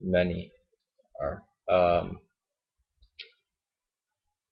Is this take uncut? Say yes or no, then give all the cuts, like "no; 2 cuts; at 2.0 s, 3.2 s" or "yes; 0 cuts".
no; 1 cut; at 1.5 s